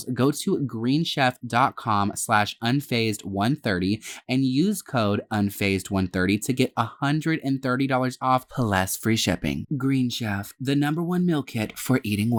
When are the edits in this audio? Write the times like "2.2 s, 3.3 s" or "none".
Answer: none